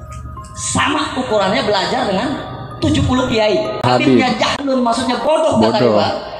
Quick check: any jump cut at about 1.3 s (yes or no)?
no